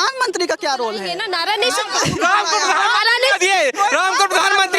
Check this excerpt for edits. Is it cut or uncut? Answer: cut